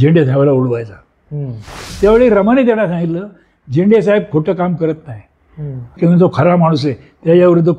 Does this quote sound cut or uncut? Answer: cut